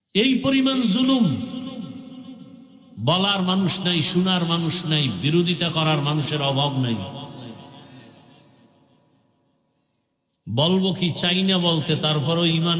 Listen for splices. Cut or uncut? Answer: uncut